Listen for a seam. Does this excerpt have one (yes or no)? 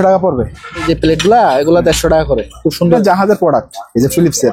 yes